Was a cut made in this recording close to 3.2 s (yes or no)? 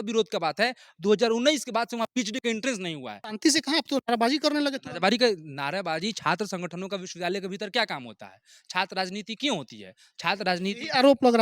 yes